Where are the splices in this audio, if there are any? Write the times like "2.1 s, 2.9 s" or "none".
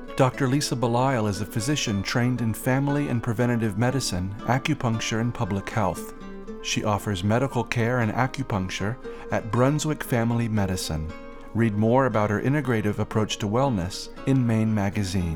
none